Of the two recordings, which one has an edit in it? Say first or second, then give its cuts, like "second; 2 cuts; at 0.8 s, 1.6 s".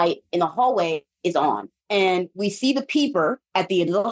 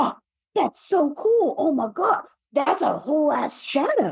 first; 1 cut; at 1.4 s